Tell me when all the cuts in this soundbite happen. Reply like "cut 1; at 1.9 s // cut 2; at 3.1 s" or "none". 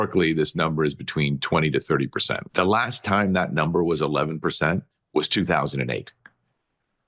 cut 1; at 2.4 s